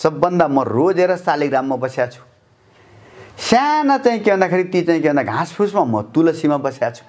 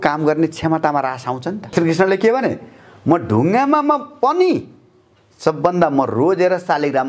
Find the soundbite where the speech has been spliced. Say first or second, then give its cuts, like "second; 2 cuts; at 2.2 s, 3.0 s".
second; 1 cut; at 1.7 s